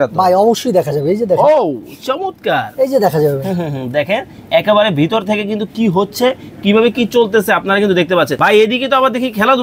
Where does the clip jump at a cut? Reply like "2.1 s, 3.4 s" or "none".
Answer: 8.4 s